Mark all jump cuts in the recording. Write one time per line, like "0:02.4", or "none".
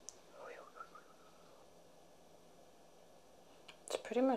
0:01.6